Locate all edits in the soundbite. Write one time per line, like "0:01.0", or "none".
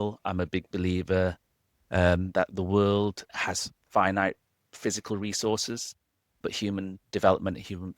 0:03.3
0:06.4